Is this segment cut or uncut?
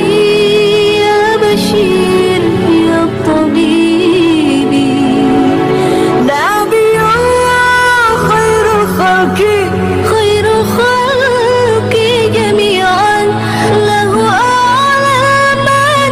uncut